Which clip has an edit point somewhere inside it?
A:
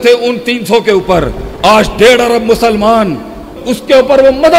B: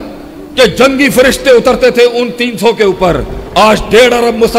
A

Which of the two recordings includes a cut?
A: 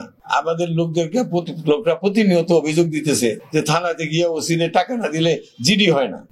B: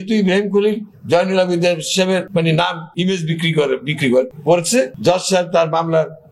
B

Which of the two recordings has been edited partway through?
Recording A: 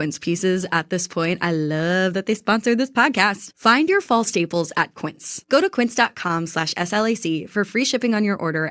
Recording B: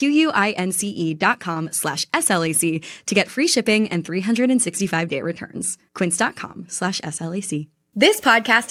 A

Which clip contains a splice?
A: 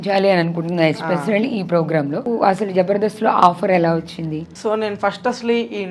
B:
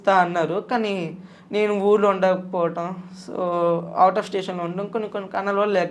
A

